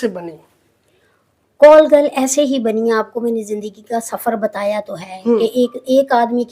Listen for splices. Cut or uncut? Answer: uncut